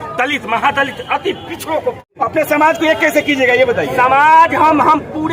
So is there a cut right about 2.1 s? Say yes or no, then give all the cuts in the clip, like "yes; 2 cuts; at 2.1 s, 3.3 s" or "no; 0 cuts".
yes; 1 cut; at 2.1 s